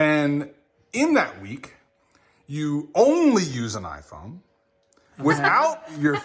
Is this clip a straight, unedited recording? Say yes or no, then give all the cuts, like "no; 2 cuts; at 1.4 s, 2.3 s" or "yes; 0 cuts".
yes; 0 cuts